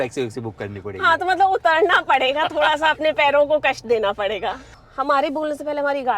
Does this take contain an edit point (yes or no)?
yes